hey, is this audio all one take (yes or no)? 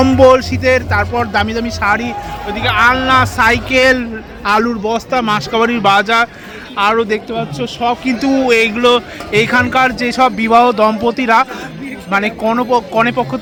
yes